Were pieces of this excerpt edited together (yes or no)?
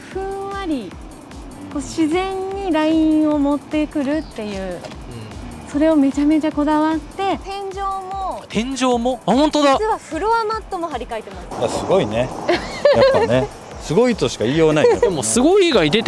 yes